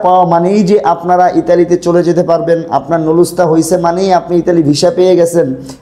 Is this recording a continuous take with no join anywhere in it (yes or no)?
yes